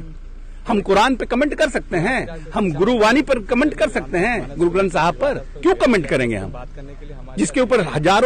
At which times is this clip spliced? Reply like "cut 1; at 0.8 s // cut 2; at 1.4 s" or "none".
none